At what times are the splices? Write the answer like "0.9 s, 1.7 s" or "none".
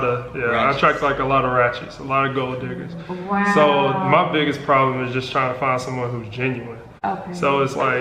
none